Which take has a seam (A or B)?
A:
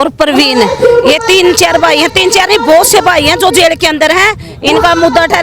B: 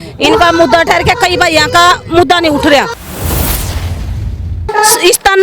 B